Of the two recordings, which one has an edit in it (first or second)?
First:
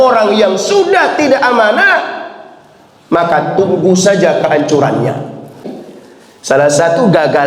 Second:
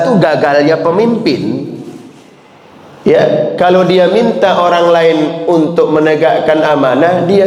first